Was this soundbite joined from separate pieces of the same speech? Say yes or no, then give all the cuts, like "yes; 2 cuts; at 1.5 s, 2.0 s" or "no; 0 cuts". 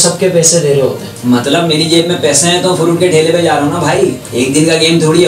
yes; 2 cuts; at 1.1 s, 4.2 s